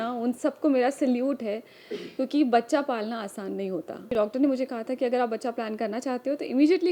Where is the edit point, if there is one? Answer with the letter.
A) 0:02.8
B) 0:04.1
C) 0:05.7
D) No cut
B